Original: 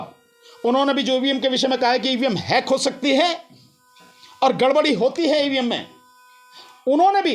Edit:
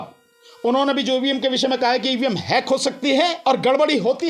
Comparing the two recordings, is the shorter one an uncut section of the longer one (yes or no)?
no